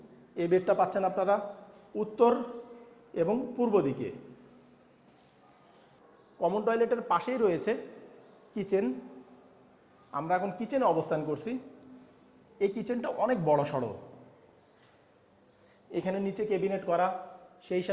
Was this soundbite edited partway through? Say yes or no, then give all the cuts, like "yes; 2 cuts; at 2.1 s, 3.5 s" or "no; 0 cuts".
yes; 1 cut; at 6.0 s